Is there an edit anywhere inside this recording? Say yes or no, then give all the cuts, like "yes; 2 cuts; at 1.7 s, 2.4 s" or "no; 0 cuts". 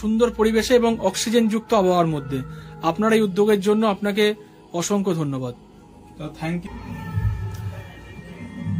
yes; 1 cut; at 6.6 s